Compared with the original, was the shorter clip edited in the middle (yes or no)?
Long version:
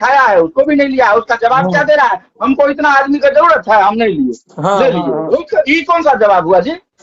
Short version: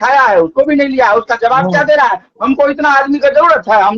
no